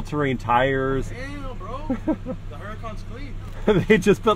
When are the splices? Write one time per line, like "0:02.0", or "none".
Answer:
0:01.1
0:03.4